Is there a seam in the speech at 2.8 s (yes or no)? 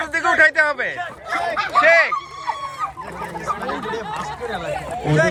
no